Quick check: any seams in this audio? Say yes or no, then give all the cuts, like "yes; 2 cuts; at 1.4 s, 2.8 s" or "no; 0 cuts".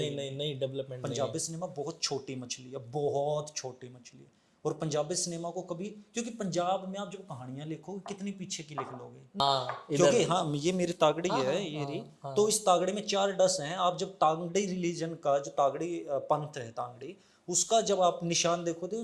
yes; 1 cut; at 9.4 s